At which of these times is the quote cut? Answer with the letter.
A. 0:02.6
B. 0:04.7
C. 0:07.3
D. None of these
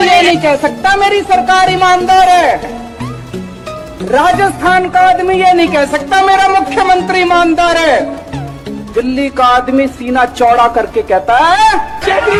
D